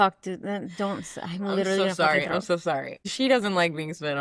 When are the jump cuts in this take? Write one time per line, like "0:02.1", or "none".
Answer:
0:02.9